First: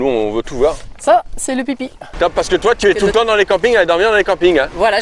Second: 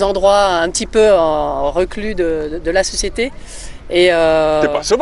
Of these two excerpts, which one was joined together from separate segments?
first; 1 cut; at 2.1 s

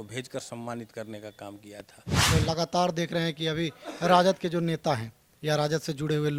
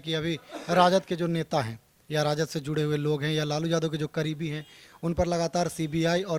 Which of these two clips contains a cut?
first; 1 cut; at 2.3 s

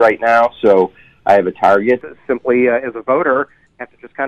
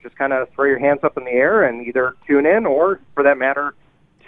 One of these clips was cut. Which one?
first; 1 cut; at 2.1 s

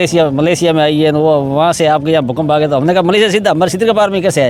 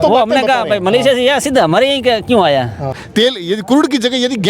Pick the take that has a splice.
second; 1 cut; at 2.9 s

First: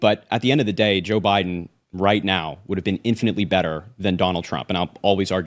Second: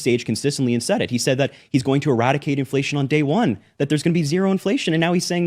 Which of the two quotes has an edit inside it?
second; 1 cut; at 3.5 s

